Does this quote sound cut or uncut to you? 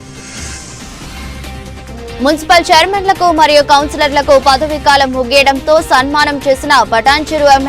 cut